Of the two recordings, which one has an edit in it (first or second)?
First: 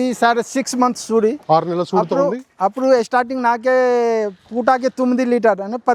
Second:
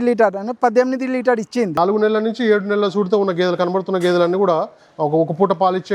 second